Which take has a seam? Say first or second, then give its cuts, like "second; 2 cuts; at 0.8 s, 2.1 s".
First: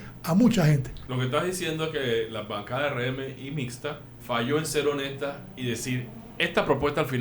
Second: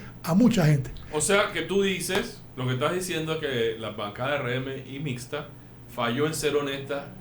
first; 2 cuts; at 0.9 s, 4.1 s